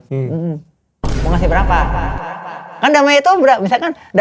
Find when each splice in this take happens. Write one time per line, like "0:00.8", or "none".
none